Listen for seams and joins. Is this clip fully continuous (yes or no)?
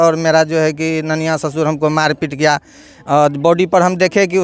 yes